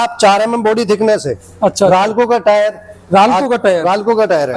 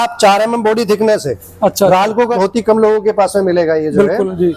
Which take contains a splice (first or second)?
second